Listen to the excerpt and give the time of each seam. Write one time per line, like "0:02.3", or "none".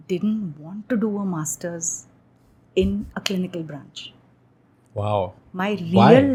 none